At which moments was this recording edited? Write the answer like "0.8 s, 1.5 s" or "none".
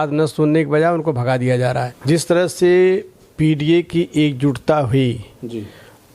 1.9 s